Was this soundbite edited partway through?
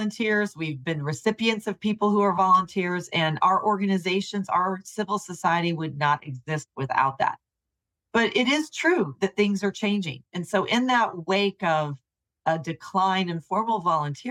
yes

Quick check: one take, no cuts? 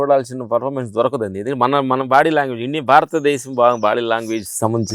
yes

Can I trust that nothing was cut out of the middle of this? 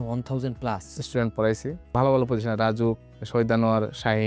no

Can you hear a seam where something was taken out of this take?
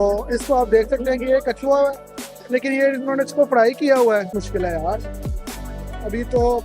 yes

